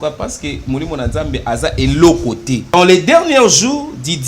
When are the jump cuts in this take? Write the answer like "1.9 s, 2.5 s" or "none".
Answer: 2.6 s